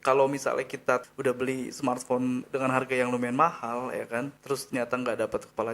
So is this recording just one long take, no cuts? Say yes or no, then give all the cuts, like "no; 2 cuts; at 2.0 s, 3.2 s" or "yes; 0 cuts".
no; 3 cuts; at 1.1 s, 2.5 s, 4.4 s